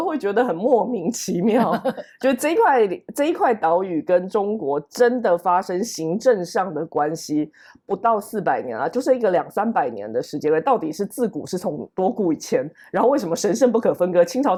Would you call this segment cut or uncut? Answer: uncut